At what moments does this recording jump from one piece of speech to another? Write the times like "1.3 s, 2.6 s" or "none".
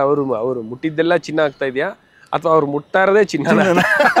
none